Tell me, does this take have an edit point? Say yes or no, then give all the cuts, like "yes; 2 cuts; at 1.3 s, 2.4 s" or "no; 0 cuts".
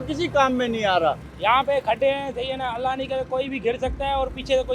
yes; 1 cut; at 1.1 s